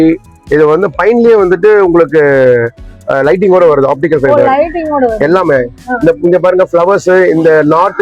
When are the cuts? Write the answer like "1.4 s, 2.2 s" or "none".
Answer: none